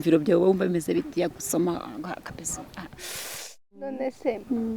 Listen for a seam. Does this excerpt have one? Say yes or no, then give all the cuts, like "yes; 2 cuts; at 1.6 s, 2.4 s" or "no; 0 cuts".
yes; 1 cut; at 3.8 s